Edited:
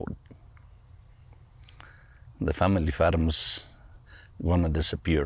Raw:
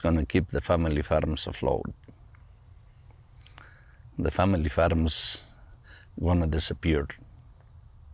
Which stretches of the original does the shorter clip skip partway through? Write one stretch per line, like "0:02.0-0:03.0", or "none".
none